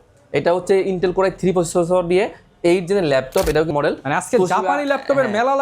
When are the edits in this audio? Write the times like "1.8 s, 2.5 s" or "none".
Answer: 3.7 s